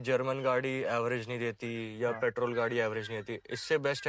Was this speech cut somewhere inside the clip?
no; 0 cuts

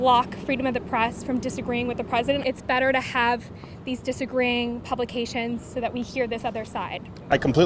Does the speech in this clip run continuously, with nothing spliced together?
no; 1 cut; at 2.4 s

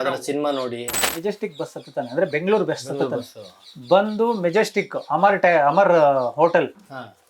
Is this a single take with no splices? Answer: no; 1 cut; at 1.0 s

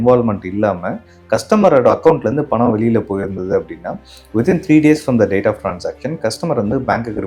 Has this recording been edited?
no; 0 cuts

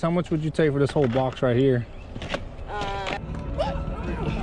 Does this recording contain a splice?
yes; 1 cut; at 3.2 s

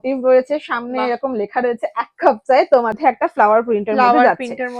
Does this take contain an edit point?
yes; 1 cut; at 3.0 s

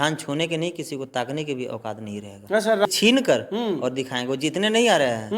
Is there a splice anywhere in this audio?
yes; 1 cut; at 2.9 s

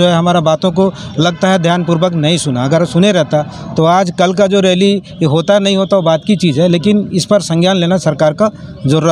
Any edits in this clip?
no; 0 cuts

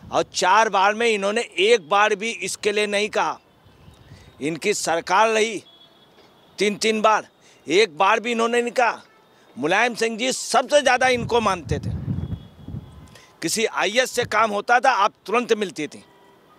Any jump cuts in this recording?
no; 0 cuts

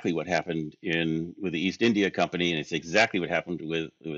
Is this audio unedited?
yes; 0 cuts

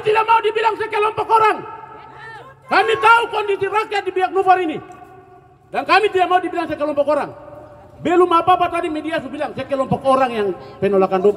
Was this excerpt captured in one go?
yes; 0 cuts

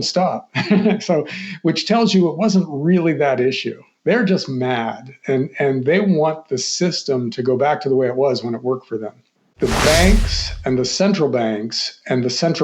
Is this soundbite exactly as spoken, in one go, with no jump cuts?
no; 1 cut; at 9.5 s

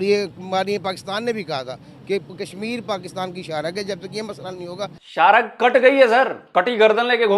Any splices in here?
yes; 2 cuts; at 5.0 s, 6.4 s

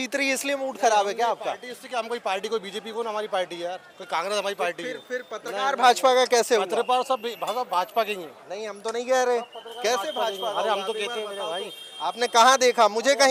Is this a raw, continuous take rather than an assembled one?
yes; 0 cuts

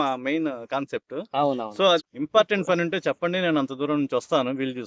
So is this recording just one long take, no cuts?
no; 1 cut; at 2.1 s

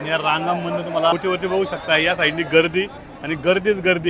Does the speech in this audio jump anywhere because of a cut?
yes; 1 cut; at 1.1 s

